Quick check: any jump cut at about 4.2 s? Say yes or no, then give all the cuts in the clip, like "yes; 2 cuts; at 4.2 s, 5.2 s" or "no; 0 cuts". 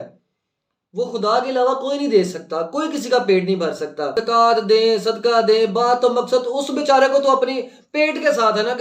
yes; 1 cut; at 4.2 s